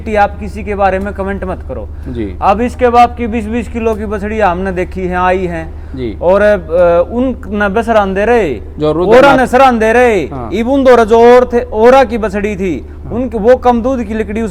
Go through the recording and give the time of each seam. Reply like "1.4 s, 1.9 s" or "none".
none